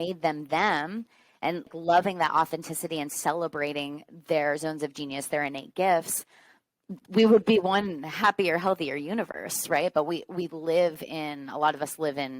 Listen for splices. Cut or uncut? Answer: cut